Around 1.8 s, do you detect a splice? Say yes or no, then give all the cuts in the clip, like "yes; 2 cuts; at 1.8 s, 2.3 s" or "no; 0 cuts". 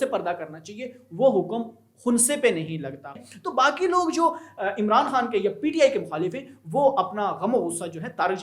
no; 1 cut; at 3.2 s